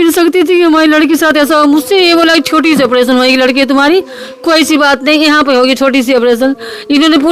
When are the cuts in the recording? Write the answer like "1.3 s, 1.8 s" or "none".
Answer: none